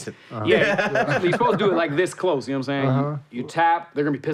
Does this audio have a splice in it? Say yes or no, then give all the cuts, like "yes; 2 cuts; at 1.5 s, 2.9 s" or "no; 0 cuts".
no; 0 cuts